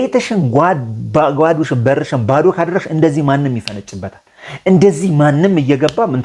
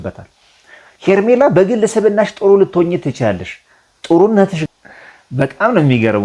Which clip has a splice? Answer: second; 1 cut; at 4.6 s

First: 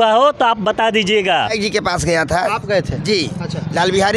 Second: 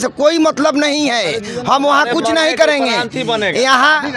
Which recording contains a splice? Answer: first; 1 cut; at 1.5 s

